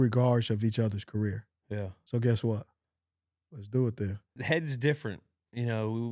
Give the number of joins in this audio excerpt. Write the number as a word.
two